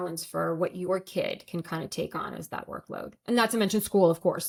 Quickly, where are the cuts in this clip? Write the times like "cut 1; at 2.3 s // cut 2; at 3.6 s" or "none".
none

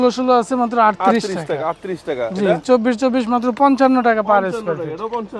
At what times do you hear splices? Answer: none

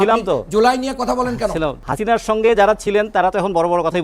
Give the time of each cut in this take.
cut 1; at 1.8 s

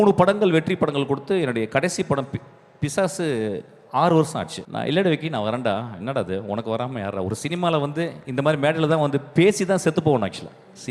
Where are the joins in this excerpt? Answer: cut 1; at 4.6 s

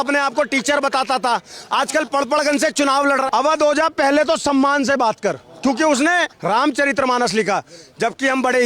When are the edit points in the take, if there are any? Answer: cut 1; at 3.3 s // cut 2; at 6.3 s

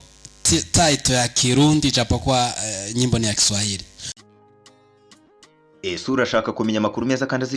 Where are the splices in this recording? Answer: cut 1; at 4.2 s

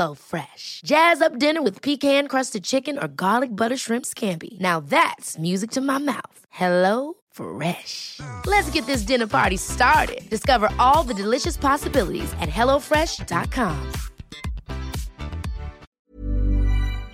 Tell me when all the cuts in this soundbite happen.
cut 1; at 15.8 s

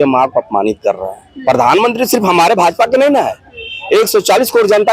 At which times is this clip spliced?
none

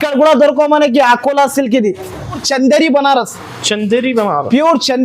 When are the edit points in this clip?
cut 1; at 2.5 s

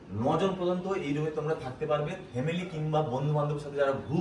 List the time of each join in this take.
none

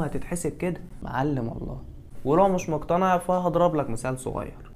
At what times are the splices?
none

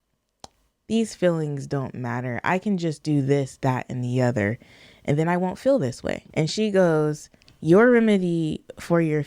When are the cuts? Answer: cut 1; at 6.2 s

